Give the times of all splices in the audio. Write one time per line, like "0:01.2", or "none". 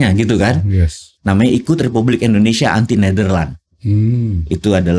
0:01.1